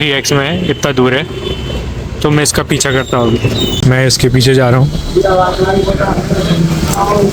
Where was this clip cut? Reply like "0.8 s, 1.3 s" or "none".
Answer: 3.8 s